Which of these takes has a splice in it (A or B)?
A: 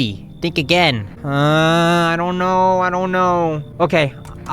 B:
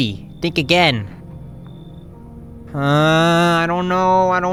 A